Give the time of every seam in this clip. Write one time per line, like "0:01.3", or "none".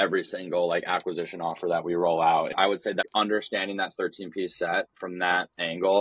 0:02.8